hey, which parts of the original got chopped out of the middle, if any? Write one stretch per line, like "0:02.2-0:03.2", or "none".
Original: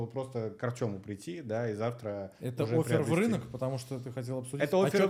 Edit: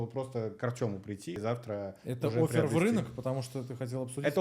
0:01.4-0:01.8